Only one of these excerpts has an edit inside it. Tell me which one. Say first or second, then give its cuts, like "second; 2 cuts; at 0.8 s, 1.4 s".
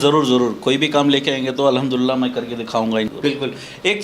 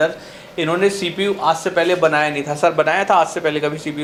first; 1 cut; at 3.1 s